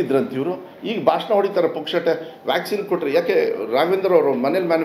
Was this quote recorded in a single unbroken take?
yes; 0 cuts

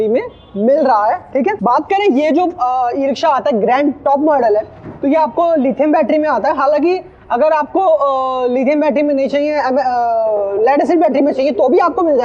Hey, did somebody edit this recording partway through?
no; 0 cuts

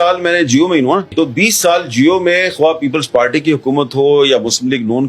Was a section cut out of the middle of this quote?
yes; 1 cut; at 1.1 s

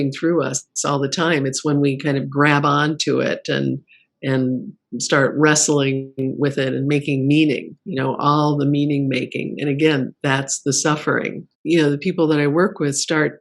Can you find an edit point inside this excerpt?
yes; 1 cut; at 11.5 s

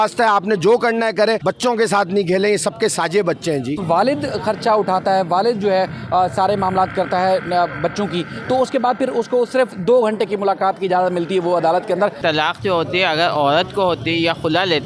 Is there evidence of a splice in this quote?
yes; 3 cuts; at 1.4 s, 3.8 s, 12.2 s

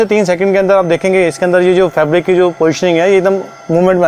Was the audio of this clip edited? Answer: no; 0 cuts

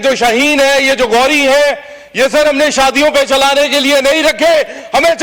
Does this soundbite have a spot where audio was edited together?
no; 0 cuts

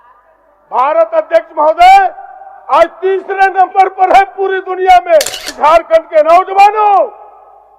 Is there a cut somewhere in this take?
yes; 1 cut; at 5.5 s

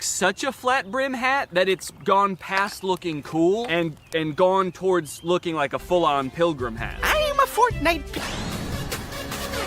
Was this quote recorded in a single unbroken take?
no; 1 cut; at 8.1 s

